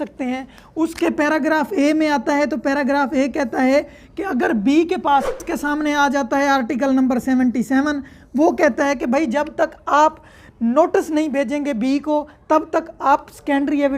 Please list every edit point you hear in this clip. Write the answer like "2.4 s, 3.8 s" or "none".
5.3 s